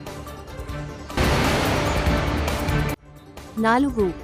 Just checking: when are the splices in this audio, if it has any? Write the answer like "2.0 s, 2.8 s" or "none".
1.2 s, 3.1 s